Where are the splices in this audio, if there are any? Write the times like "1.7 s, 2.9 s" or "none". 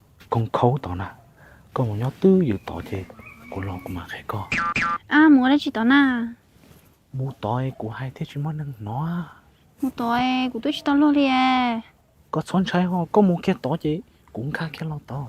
none